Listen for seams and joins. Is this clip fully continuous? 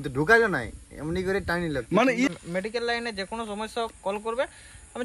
no; 1 cut; at 2.3 s

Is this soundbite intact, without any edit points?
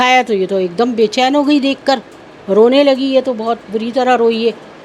yes; 0 cuts

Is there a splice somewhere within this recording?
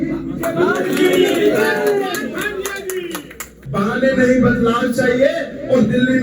yes; 1 cut; at 3.6 s

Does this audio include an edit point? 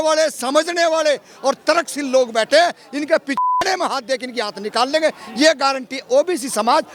no; 0 cuts

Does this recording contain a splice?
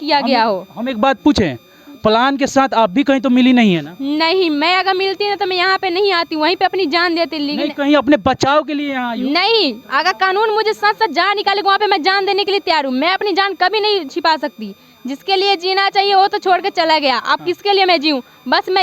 no; 0 cuts

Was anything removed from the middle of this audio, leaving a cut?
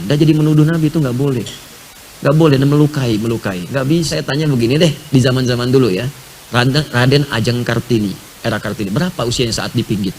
yes; 1 cut; at 4.2 s

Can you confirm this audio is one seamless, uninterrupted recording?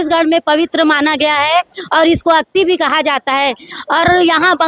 yes; 0 cuts

